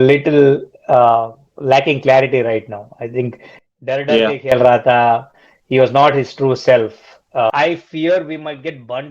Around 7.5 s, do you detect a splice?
yes; 1 cut; at 7.5 s

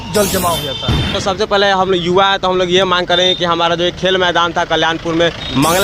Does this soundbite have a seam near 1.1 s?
yes; 1 cut; at 1.1 s

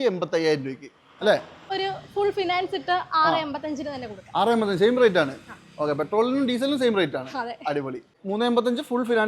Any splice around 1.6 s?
yes; 2 cuts; at 1.6 s, 8.0 s

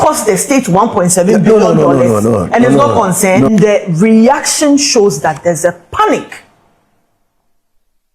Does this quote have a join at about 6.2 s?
no; 1 cut; at 3.5 s

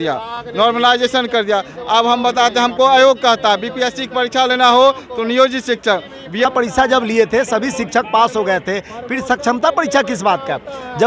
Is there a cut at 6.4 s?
yes; 1 cut; at 6.4 s

